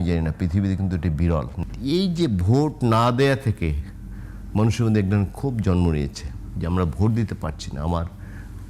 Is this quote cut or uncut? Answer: cut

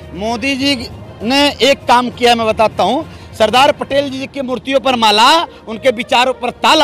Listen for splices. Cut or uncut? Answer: uncut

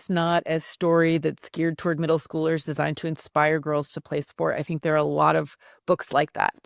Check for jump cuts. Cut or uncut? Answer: uncut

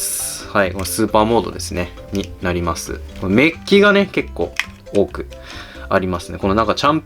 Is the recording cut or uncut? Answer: uncut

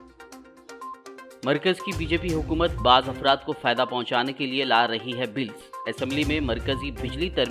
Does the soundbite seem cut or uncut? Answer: cut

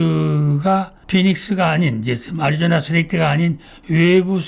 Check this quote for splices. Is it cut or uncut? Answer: uncut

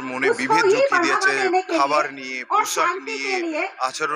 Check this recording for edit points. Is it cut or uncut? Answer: uncut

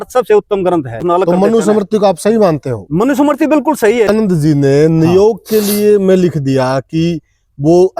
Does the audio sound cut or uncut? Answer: cut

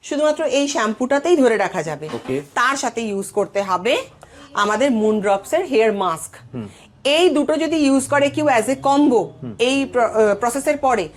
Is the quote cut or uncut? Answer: uncut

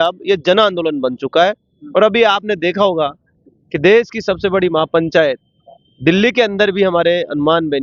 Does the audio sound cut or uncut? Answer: uncut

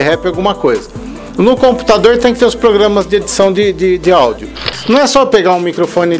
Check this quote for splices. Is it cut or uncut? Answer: cut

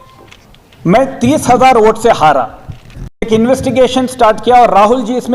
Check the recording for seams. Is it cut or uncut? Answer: cut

